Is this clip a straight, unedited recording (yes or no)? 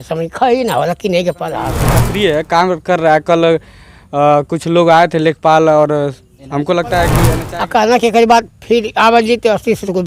no